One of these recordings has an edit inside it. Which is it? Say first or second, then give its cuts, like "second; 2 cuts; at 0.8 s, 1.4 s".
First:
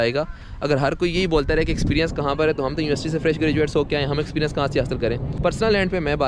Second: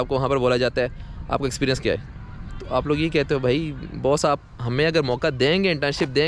first; 1 cut; at 5.3 s